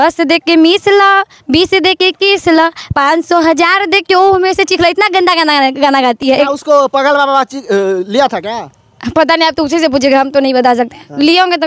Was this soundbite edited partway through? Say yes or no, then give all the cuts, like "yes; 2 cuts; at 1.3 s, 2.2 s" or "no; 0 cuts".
no; 0 cuts